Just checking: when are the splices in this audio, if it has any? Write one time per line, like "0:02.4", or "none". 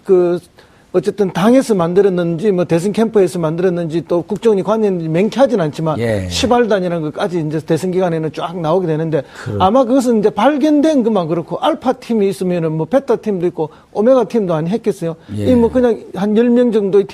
0:08.9

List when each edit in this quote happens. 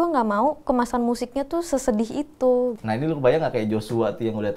0:02.8

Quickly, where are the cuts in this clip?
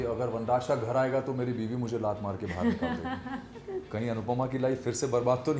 0:03.9

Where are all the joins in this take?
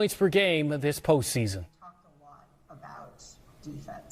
none

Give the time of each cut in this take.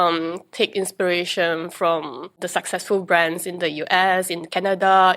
0:02.4

